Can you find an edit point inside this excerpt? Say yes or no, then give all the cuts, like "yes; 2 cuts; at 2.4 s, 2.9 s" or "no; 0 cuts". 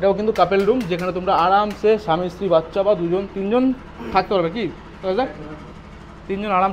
no; 0 cuts